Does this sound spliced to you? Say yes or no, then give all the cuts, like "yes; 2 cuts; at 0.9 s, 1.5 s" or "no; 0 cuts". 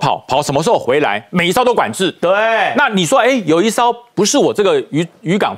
no; 0 cuts